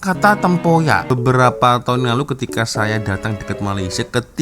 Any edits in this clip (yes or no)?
yes